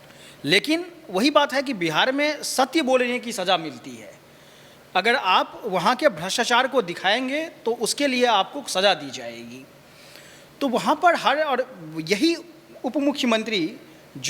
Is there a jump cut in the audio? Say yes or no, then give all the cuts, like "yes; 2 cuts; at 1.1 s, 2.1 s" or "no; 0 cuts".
no; 0 cuts